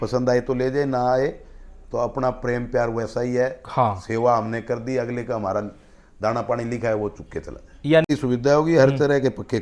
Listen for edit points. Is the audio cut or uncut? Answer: cut